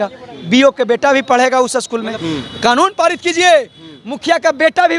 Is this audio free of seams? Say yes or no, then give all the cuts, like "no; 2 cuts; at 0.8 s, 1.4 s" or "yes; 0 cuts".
no; 1 cut; at 2.2 s